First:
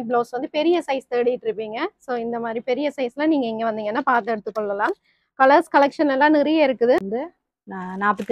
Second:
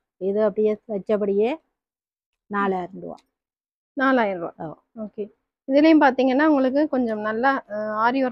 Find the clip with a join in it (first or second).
first